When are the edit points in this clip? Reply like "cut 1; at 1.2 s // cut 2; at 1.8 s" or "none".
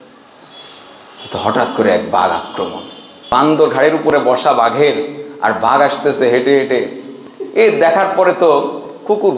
cut 1; at 3.3 s